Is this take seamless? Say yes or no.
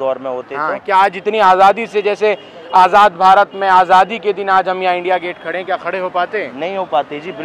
yes